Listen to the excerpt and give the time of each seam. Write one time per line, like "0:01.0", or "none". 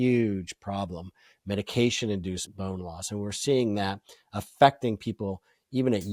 none